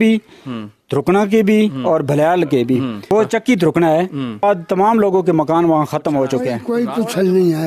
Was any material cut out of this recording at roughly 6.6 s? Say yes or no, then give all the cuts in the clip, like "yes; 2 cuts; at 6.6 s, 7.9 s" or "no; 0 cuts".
yes; 3 cuts; at 3.0 s, 4.4 s, 6.6 s